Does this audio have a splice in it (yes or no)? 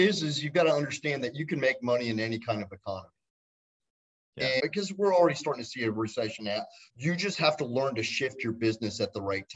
yes